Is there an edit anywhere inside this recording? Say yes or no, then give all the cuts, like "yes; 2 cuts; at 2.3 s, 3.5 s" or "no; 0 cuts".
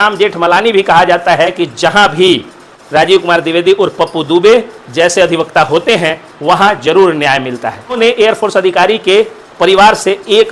yes; 2 cuts; at 1.6 s, 8.0 s